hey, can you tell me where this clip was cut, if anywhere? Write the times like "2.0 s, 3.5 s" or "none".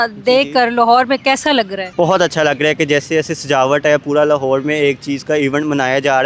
1.8 s